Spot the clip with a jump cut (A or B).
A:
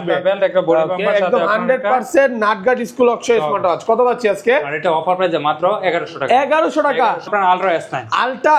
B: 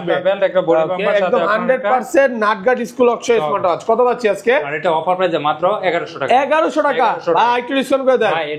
A